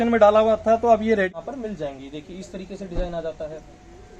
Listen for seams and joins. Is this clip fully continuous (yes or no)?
no